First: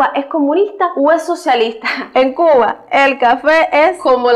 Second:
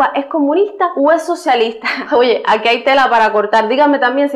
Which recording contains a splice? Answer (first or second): first